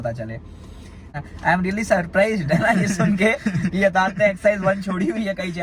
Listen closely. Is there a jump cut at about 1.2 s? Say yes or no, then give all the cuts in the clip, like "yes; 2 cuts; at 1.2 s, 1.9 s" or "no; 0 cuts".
yes; 1 cut; at 1.2 s